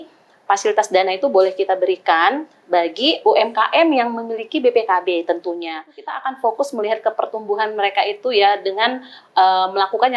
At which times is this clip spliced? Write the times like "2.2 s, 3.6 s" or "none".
6.2 s